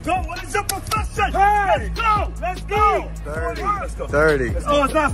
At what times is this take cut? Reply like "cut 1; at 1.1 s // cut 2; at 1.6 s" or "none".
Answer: cut 1; at 3.6 s